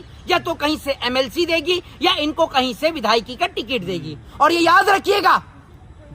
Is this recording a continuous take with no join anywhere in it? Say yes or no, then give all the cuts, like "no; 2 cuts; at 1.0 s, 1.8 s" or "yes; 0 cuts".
no; 1 cut; at 4.2 s